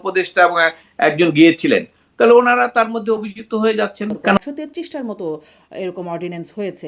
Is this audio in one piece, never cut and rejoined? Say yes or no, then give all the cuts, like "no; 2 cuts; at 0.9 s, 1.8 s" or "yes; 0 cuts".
no; 1 cut; at 4.4 s